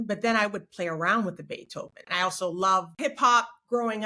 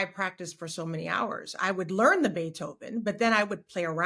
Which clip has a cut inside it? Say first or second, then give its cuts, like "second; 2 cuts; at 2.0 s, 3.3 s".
first; 2 cuts; at 2.0 s, 2.9 s